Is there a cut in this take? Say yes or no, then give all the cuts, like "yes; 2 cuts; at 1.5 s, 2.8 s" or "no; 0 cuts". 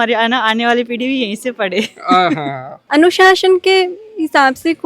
yes; 1 cut; at 2.9 s